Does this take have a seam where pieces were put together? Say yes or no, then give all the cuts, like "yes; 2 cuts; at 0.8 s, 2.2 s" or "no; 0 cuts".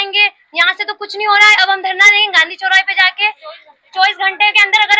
no; 0 cuts